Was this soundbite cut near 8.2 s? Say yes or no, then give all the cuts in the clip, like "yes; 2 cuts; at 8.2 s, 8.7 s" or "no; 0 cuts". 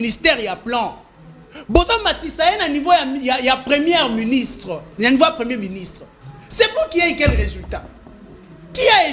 no; 0 cuts